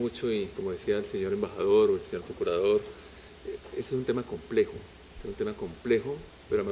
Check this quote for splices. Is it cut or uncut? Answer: cut